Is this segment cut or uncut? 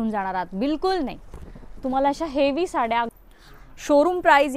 cut